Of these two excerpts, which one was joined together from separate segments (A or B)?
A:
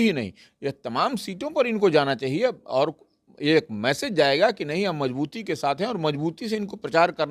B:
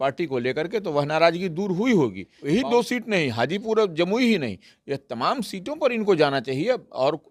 B